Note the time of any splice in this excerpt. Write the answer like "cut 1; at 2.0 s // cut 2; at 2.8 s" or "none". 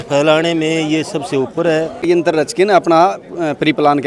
cut 1; at 2.0 s